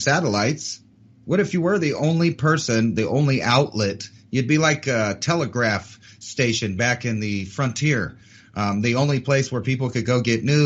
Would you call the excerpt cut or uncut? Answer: uncut